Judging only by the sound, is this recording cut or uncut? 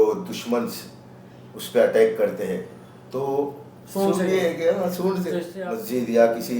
cut